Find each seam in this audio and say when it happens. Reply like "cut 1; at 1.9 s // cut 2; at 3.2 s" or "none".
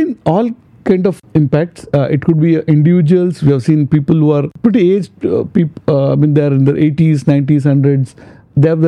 cut 1; at 1.2 s // cut 2; at 4.5 s